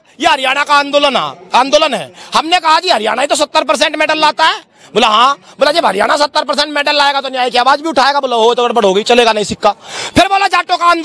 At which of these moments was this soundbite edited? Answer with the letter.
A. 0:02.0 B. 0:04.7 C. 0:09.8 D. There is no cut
D